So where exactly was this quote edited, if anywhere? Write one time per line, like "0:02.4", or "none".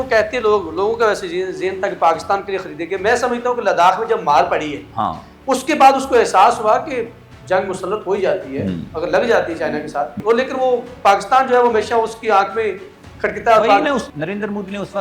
0:07.3
0:10.1
0:14.1